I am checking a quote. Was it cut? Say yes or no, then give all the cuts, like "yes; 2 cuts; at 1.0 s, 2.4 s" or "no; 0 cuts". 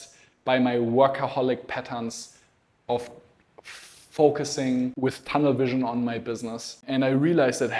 yes; 2 cuts; at 4.9 s, 6.8 s